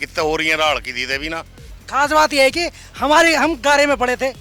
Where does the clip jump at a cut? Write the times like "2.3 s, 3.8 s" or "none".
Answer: 1.8 s